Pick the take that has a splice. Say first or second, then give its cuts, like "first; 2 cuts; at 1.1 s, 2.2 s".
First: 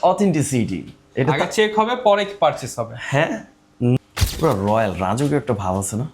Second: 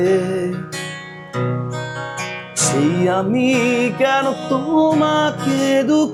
first; 1 cut; at 4.0 s